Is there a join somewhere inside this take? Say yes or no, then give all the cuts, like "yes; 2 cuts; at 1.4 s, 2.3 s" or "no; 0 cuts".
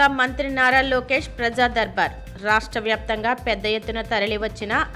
no; 0 cuts